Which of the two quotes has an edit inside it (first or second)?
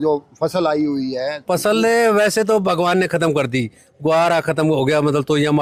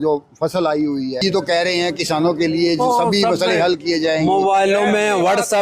second